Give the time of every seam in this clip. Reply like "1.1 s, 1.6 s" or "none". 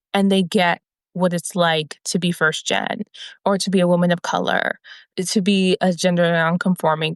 3.2 s